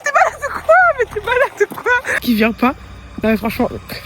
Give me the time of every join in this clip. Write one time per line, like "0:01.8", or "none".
0:02.1